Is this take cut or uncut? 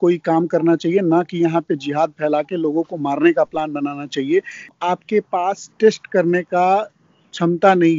cut